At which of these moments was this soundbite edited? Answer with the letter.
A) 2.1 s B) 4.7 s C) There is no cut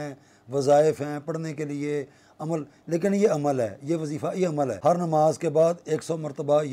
B